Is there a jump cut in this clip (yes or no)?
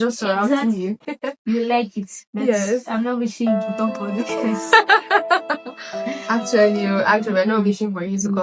yes